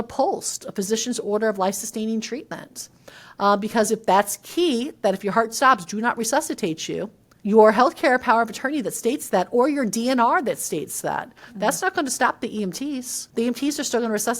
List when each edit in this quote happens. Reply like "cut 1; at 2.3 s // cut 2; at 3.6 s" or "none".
cut 1; at 7.2 s // cut 2; at 13.2 s